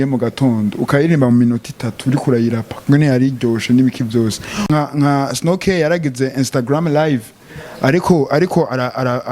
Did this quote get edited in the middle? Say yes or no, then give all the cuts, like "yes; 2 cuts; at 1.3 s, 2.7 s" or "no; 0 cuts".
yes; 1 cut; at 4.7 s